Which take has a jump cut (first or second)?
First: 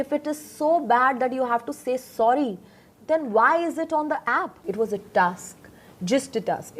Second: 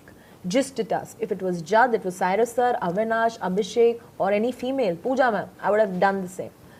first